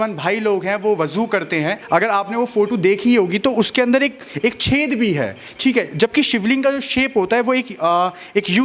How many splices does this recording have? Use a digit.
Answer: 1